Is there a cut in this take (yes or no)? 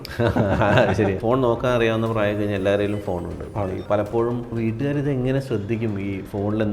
yes